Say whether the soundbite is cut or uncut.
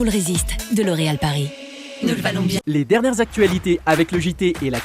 cut